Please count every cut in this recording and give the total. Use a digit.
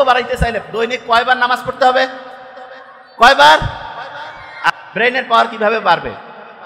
1